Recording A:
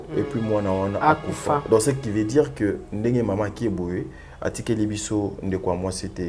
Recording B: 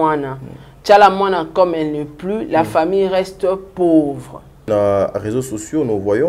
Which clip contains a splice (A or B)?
B